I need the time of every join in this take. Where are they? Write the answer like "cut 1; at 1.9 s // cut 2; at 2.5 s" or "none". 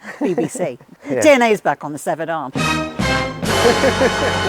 cut 1; at 0.9 s